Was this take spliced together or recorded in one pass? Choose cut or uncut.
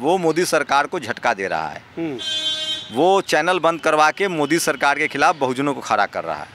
uncut